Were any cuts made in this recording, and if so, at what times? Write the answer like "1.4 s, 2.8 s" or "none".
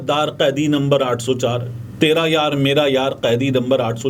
none